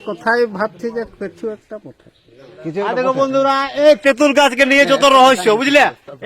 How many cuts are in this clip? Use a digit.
1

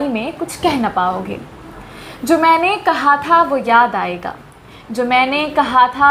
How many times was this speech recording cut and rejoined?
0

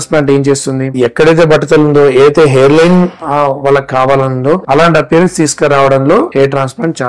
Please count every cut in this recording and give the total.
1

